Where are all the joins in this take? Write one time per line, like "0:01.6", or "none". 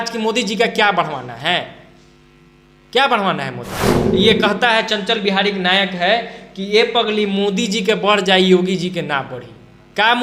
0:04.0